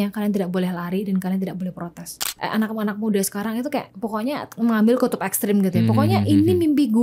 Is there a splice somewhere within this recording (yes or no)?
yes